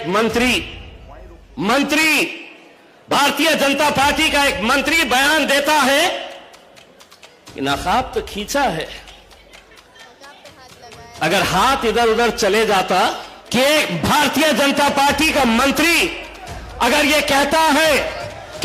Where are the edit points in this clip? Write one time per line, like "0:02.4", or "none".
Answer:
0:13.3

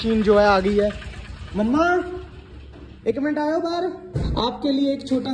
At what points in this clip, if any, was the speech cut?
0:04.1

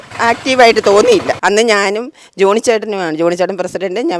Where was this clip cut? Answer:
0:01.3

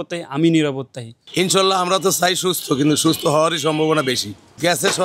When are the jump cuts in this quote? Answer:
none

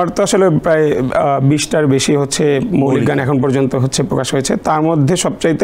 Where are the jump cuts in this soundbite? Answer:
none

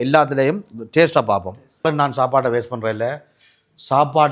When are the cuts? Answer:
0:01.8

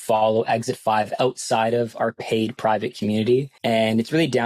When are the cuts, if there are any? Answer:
0:03.5

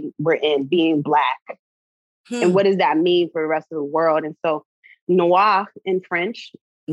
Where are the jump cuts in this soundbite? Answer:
none

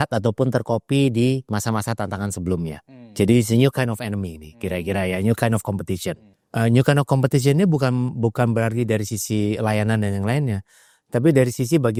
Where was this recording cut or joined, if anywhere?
none

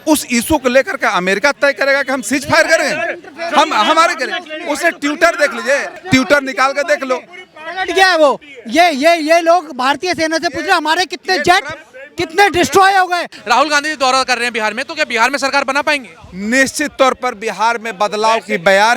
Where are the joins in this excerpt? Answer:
0:05.9
0:13.3

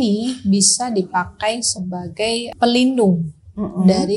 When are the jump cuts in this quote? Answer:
0:02.5

